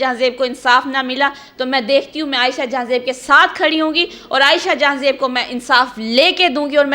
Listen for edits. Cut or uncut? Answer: uncut